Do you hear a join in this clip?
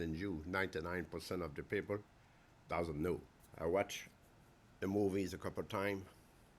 no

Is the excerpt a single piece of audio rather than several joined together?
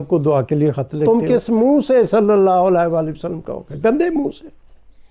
no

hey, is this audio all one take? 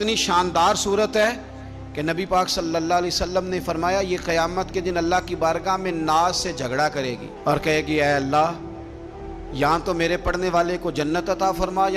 yes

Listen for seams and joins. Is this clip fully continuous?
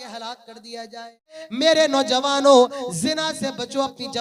no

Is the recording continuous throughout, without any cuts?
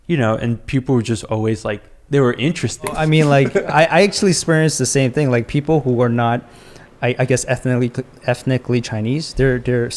no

